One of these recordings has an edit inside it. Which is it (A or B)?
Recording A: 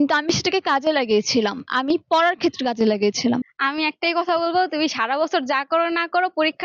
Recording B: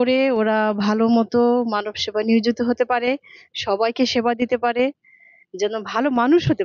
A